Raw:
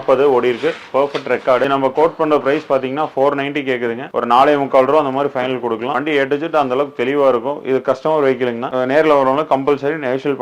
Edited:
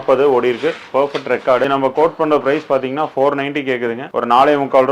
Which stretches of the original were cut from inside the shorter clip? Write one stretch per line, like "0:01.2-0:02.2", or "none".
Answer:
none